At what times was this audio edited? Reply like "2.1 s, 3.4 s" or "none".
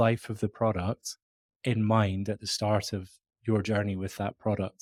none